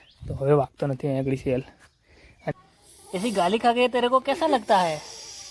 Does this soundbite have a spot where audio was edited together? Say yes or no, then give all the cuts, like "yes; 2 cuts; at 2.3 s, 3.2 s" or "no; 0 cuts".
yes; 1 cut; at 2.5 s